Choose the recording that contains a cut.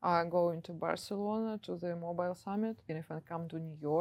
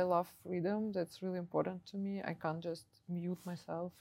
first; 1 cut; at 2.9 s

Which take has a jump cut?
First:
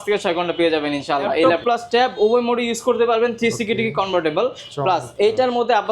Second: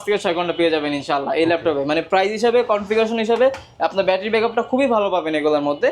first; 1 cut; at 1.5 s

